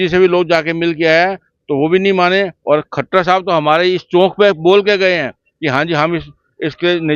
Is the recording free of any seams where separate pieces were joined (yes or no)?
yes